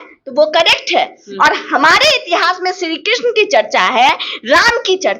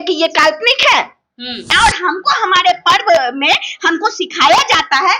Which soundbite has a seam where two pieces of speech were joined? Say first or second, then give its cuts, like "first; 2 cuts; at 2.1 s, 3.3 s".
second; 1 cut; at 1.8 s